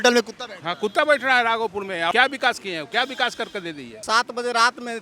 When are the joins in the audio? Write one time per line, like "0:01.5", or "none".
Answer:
0:02.1
0:04.0